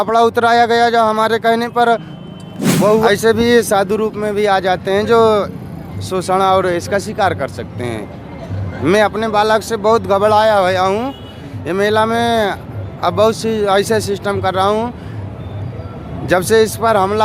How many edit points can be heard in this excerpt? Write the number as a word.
one